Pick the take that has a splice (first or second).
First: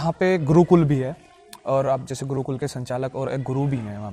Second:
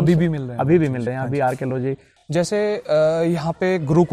second